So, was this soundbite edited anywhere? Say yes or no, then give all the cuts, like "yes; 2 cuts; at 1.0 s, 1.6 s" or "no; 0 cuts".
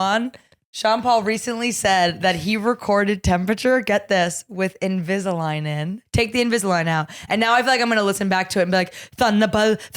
yes; 1 cut; at 6.0 s